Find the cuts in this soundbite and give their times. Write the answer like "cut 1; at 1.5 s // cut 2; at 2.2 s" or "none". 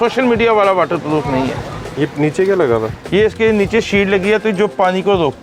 none